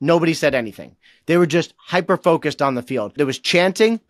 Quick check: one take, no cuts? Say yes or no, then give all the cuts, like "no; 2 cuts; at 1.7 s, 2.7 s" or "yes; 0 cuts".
no; 1 cut; at 3.1 s